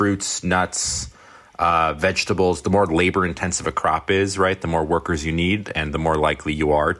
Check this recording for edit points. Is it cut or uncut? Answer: uncut